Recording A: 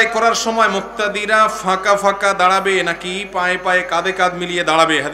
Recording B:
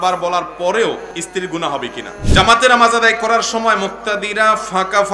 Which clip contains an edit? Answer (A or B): B